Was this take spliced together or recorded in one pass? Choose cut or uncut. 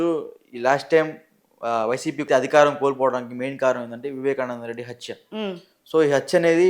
cut